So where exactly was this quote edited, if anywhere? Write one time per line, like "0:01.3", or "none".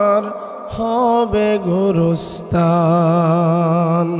none